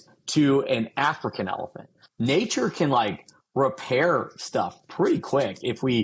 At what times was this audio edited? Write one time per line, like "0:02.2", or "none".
0:02.0